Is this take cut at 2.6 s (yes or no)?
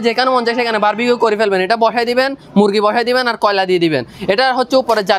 no